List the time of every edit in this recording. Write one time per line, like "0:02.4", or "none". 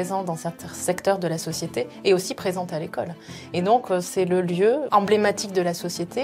0:04.8